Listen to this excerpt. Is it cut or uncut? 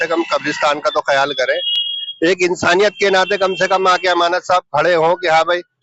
uncut